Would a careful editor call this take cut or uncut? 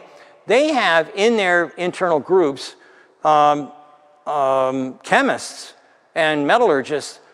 uncut